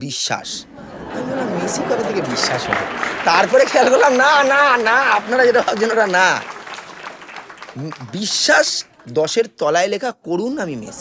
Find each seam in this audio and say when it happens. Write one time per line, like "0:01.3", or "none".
none